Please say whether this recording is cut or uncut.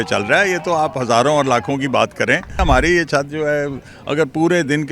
cut